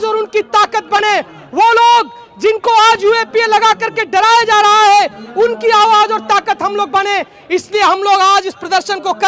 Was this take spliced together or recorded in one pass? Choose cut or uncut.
uncut